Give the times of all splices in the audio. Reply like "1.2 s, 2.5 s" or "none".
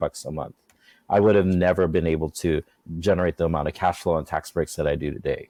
none